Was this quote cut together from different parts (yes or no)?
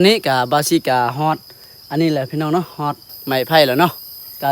yes